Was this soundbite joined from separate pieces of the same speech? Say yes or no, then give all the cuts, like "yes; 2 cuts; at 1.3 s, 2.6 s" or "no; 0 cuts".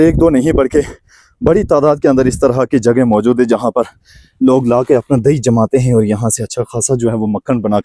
no; 0 cuts